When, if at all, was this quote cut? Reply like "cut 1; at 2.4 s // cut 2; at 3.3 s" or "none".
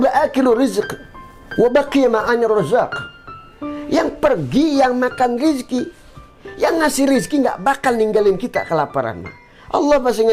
none